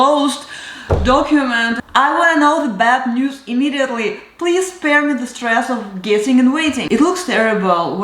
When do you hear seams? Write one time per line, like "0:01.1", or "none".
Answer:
0:01.8
0:06.8

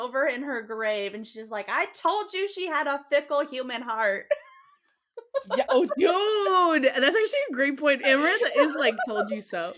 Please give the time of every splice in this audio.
none

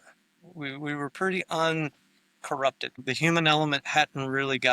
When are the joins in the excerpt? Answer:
0:03.0

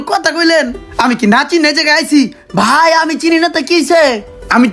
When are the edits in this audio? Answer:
none

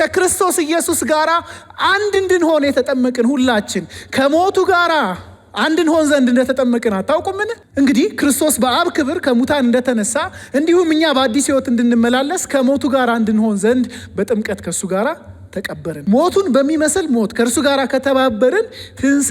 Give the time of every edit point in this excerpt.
0:07.6
0:16.0

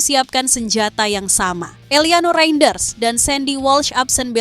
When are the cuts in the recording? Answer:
0:01.8

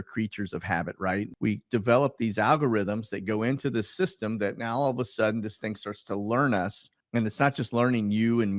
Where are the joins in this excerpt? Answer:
0:01.3
0:06.9

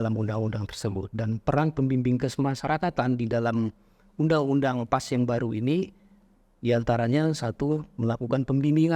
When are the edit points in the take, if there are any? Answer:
none

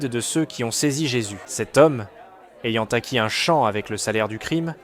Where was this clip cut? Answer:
0:01.4

